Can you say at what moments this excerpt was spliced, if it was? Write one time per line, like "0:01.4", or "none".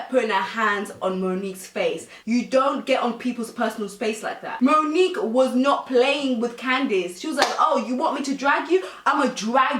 0:04.5